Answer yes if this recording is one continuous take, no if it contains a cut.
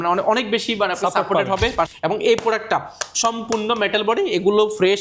no